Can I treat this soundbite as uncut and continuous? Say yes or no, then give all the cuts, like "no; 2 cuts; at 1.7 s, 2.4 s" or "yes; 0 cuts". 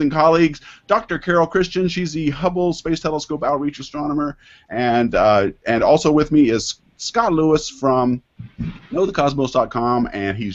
no; 1 cut; at 8.0 s